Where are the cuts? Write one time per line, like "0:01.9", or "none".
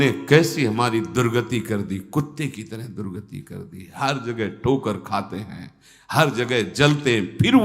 none